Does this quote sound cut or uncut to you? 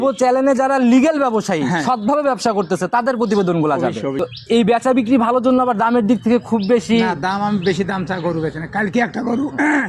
cut